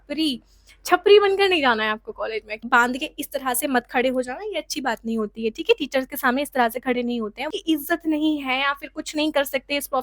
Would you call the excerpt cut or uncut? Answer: cut